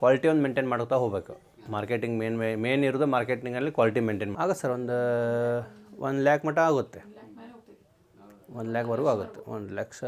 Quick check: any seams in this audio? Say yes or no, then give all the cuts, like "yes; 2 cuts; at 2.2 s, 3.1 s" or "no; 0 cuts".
yes; 1 cut; at 4.3 s